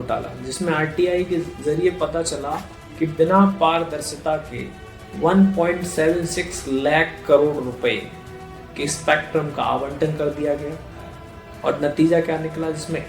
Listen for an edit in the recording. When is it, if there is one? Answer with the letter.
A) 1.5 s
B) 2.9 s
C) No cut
A